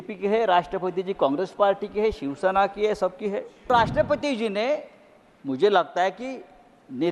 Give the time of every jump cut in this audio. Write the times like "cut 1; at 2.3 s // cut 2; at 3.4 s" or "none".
cut 1; at 3.7 s